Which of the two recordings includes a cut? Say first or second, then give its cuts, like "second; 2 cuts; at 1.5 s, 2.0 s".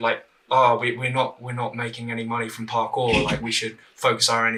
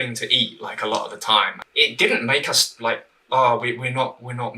second; 1 cut; at 1.6 s